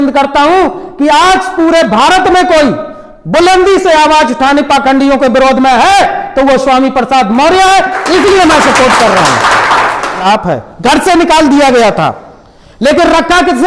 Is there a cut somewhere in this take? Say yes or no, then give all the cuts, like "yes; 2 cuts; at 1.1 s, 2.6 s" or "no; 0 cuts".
yes; 1 cut; at 10.2 s